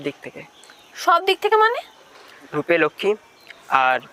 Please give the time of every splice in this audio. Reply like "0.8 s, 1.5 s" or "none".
2.5 s